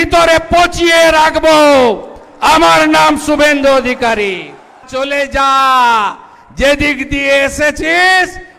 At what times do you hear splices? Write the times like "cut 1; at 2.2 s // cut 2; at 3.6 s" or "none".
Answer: cut 1; at 4.9 s